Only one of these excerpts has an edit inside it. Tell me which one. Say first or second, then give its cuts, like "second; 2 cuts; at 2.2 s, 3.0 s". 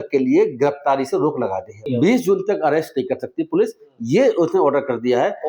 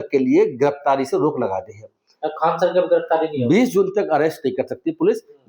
first; 1 cut; at 1.8 s